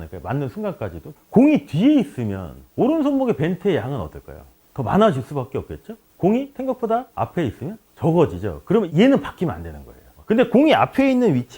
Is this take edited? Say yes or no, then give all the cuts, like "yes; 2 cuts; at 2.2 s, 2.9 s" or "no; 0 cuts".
yes; 1 cut; at 1.1 s